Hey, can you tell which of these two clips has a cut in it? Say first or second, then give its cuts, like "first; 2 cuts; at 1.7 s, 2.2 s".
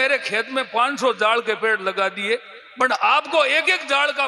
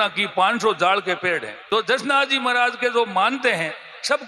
second; 1 cut; at 1.5 s